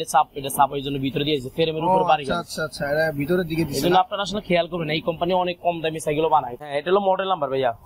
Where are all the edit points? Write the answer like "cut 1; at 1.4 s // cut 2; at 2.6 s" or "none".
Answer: cut 1; at 6.6 s